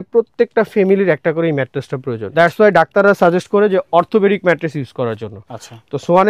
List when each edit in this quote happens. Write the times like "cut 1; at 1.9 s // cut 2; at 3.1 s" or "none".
cut 1; at 2.3 s